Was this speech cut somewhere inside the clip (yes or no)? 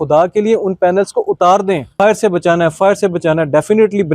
yes